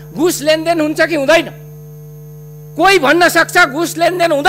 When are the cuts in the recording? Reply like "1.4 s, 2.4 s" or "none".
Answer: none